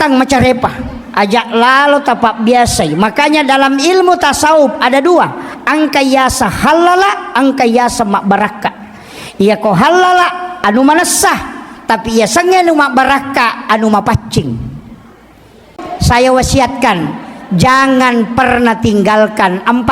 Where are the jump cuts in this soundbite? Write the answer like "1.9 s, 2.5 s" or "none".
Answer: 15.8 s